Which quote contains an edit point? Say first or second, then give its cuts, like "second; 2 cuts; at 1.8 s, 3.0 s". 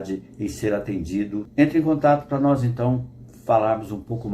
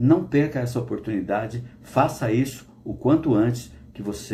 first; 1 cut; at 1.5 s